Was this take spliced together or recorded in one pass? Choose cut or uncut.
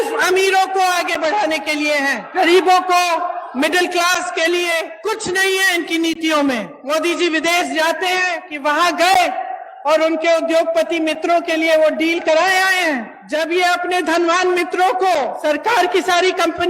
cut